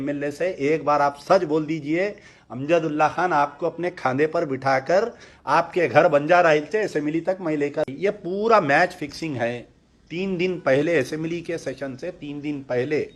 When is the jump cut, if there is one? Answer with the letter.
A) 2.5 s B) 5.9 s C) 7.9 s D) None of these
C